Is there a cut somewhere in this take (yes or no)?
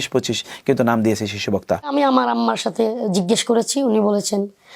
yes